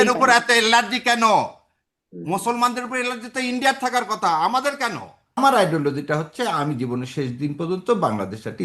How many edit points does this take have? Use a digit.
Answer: 1